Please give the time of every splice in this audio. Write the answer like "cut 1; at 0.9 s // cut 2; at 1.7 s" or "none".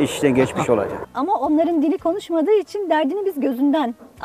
cut 1; at 1.0 s